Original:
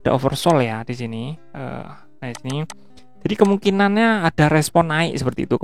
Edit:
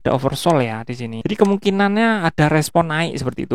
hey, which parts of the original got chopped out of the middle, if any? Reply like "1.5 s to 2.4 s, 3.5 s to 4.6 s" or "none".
1.1 s to 3.1 s